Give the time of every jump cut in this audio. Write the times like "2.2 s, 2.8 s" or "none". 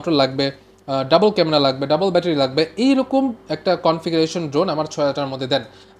none